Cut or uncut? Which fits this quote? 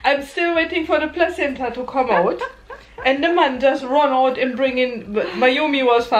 uncut